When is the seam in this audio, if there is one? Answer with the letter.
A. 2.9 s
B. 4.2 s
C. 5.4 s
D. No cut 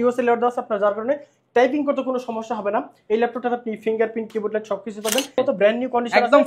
C